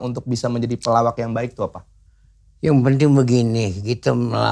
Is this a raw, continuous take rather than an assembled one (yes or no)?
yes